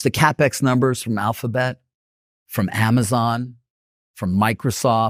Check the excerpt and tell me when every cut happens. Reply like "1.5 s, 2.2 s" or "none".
none